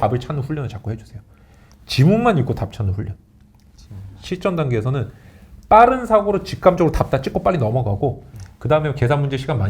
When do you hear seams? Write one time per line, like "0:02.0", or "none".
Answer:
0:04.1